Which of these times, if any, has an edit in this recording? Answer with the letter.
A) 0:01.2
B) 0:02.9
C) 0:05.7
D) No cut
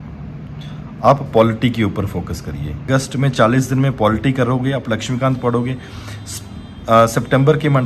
B